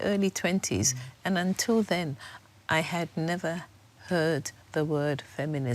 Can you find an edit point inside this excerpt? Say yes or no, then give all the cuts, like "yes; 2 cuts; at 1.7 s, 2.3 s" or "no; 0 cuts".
no; 0 cuts